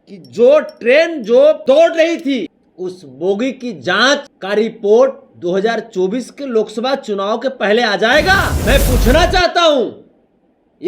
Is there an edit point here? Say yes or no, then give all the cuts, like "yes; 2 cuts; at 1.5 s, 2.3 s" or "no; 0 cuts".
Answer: yes; 4 cuts; at 1.6 s, 2.6 s, 4.3 s, 8.5 s